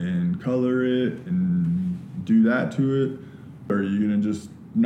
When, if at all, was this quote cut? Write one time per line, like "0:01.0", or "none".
0:03.7